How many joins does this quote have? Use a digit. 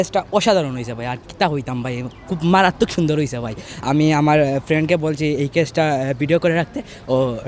0